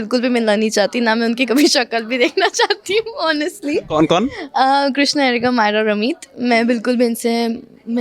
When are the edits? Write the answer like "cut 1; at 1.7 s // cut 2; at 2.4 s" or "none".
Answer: none